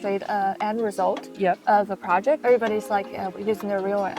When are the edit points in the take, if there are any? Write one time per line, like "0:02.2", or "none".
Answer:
0:02.4